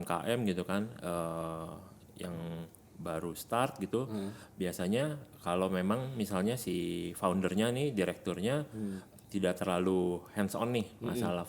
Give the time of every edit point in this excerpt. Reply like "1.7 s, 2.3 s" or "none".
none